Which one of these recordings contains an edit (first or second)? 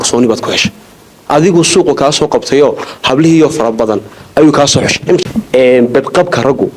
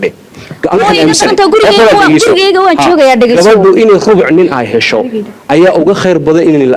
first